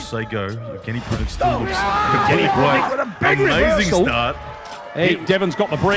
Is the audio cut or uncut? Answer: uncut